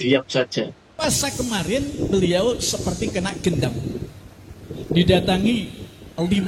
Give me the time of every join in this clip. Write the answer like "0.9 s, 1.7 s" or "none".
1.0 s